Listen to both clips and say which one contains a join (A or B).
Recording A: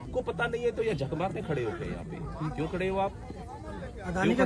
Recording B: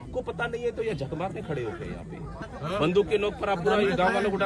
B